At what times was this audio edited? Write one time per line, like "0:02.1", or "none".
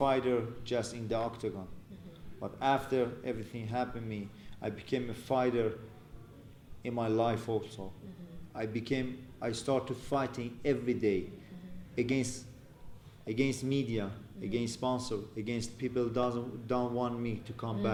none